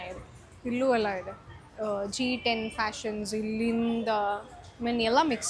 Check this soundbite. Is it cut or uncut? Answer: uncut